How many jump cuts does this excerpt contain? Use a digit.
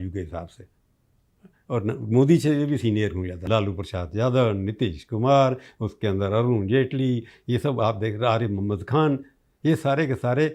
1